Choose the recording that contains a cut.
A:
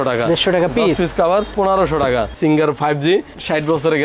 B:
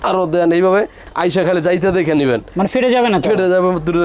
A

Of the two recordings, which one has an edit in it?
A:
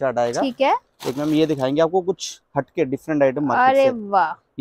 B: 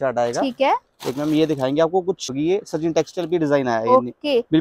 B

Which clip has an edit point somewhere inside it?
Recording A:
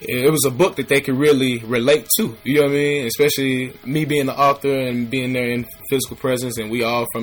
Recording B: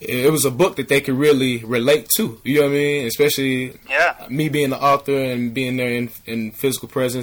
A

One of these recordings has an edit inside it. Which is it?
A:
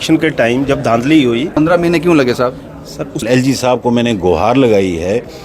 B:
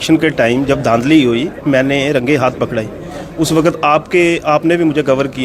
A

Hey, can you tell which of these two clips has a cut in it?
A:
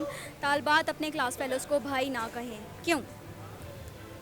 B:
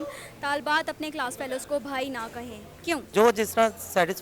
B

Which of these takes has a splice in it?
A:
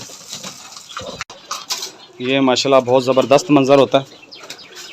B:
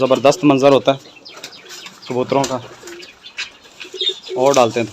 A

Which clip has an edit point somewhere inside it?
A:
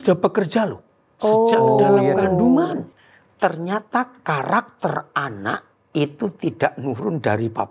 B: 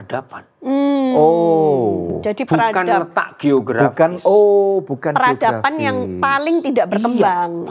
A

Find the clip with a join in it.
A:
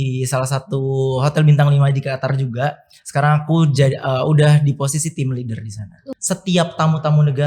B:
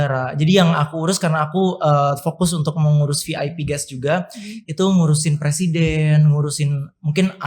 A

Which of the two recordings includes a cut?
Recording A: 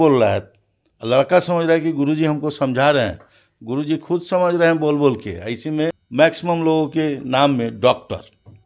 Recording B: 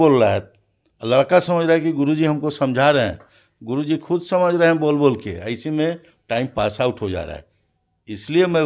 A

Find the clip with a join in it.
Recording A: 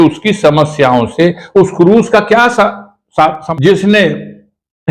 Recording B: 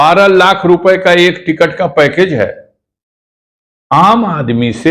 A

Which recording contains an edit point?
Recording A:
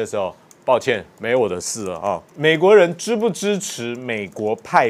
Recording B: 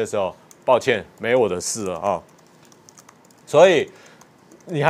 A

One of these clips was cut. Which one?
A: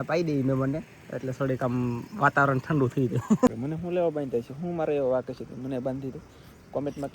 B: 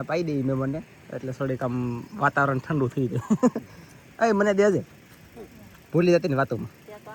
A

